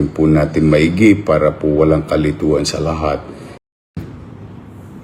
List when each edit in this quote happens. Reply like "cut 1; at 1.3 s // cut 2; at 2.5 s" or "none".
cut 1; at 3.7 s